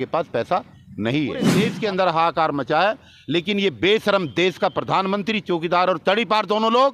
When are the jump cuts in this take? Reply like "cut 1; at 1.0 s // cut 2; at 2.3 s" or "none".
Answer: cut 1; at 1.6 s